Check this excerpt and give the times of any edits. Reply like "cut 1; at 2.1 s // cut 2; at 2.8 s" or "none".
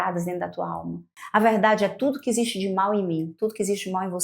cut 1; at 1.1 s